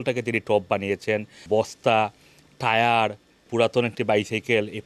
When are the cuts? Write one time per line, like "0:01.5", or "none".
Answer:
0:01.4
0:03.5